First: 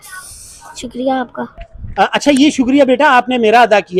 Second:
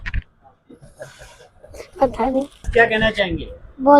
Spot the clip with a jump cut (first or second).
second